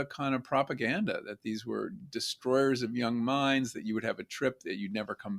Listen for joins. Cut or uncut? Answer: uncut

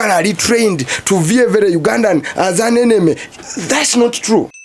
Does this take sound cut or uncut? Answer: uncut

